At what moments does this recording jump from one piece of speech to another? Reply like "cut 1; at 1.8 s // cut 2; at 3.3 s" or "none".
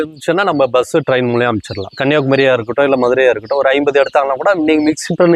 none